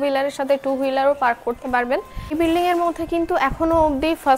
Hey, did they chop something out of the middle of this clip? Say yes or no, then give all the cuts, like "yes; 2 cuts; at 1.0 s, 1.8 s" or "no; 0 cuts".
yes; 1 cut; at 2.3 s